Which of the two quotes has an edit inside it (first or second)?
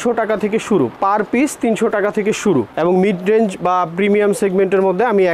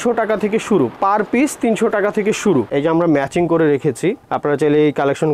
second